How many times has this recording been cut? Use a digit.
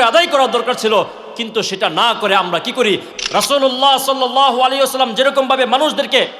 1